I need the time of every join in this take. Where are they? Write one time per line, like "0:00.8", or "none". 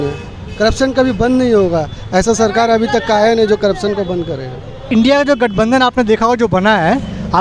0:04.9